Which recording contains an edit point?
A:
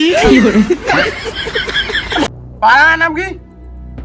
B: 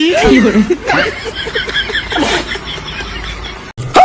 A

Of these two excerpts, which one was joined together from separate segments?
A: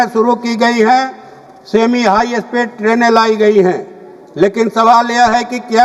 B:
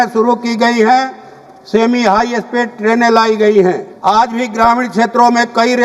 B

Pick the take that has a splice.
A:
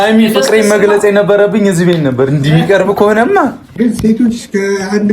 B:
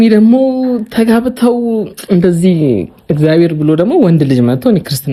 A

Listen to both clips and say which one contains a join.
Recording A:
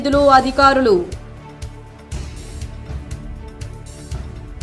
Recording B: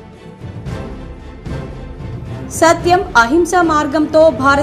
B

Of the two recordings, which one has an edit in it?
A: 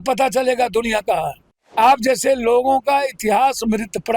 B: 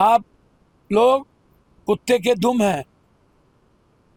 A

